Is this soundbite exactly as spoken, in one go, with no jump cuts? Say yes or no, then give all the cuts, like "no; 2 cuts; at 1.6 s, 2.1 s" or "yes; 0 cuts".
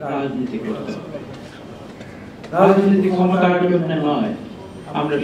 yes; 0 cuts